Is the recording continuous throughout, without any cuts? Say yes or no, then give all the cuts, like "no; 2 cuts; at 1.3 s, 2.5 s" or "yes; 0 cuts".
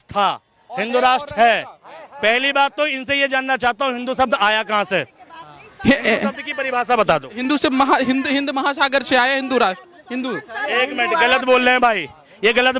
yes; 0 cuts